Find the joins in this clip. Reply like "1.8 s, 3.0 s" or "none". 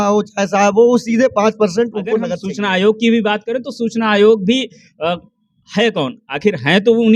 2.4 s

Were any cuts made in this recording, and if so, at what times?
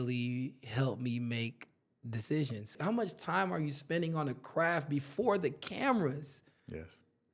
2.8 s

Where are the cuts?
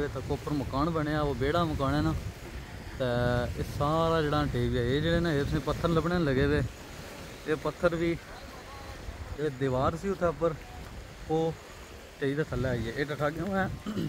none

